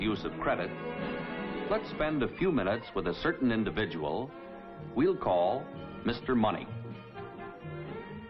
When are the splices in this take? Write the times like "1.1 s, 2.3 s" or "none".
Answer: 4.9 s